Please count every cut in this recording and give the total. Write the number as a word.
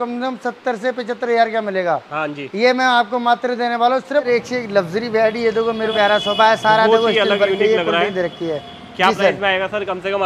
two